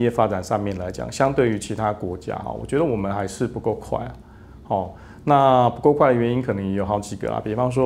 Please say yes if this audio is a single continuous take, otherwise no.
yes